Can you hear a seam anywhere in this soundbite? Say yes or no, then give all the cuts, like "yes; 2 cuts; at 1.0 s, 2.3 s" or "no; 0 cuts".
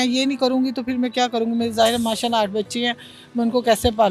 no; 0 cuts